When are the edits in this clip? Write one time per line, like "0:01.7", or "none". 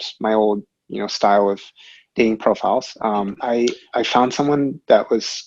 0:03.4